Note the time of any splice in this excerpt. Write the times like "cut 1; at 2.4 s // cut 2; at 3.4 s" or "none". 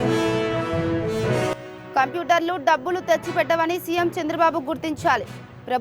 cut 1; at 1.5 s